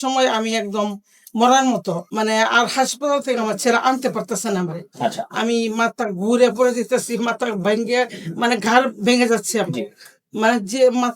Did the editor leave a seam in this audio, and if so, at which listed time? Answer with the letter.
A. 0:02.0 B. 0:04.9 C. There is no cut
A